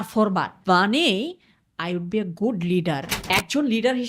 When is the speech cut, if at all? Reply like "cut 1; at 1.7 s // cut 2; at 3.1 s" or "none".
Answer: cut 1; at 3.1 s